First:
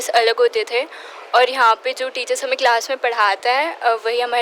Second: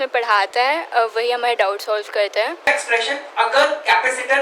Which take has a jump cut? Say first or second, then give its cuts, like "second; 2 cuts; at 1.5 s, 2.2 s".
second; 1 cut; at 2.7 s